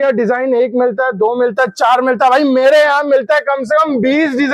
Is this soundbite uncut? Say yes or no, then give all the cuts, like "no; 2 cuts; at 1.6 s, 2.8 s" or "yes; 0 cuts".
yes; 0 cuts